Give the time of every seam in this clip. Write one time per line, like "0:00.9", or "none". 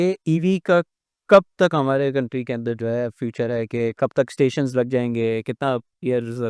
none